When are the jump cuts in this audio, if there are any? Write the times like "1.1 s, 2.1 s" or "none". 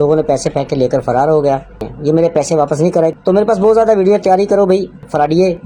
3.2 s